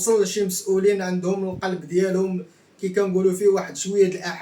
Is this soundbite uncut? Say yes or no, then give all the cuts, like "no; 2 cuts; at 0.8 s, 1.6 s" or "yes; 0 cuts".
yes; 0 cuts